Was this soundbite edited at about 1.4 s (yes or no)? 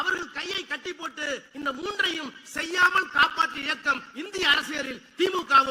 no